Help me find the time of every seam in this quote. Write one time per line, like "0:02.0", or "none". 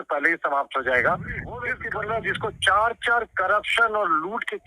0:01.7